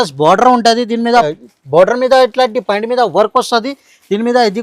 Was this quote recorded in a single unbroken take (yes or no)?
no